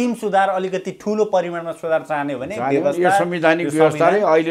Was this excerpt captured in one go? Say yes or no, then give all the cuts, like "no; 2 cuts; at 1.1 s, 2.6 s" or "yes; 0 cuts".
yes; 0 cuts